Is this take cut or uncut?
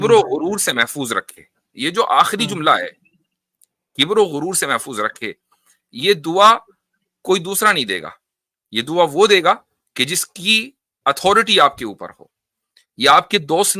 uncut